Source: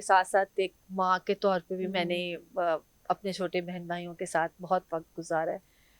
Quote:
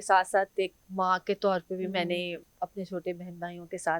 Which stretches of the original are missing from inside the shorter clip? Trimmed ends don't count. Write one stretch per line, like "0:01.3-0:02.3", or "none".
0:02.4-0:02.9